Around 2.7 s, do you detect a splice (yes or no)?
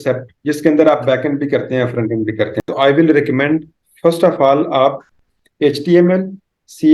yes